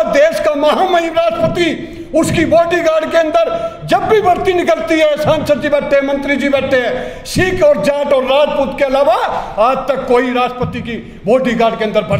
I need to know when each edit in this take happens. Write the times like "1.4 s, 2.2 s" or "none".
none